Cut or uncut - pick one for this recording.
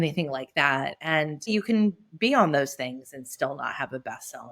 cut